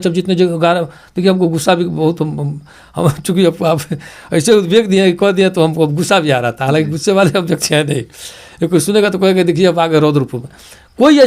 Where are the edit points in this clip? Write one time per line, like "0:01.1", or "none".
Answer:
none